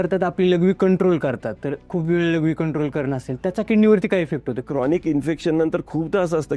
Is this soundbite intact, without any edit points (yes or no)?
no